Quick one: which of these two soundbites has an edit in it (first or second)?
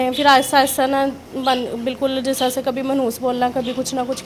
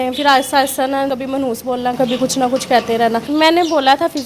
second